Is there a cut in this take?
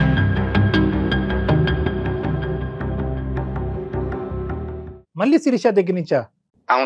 no; 0 cuts

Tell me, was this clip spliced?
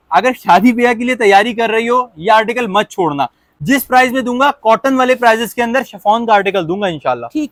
no; 0 cuts

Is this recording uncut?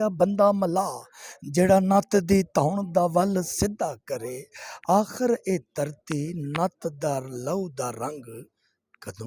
yes; 0 cuts

